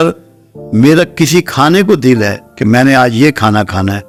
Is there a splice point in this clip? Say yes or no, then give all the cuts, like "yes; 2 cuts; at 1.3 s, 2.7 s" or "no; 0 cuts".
no; 0 cuts